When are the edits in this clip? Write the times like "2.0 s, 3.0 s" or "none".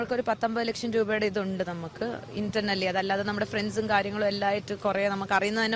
none